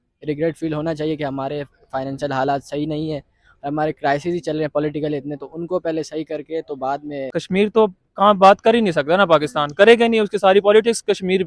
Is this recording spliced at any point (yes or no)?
yes